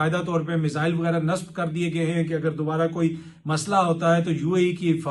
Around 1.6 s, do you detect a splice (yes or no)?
no